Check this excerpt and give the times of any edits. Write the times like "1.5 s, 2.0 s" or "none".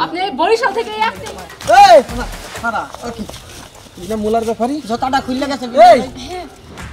1.2 s